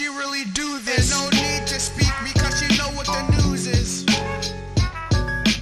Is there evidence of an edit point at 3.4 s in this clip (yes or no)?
yes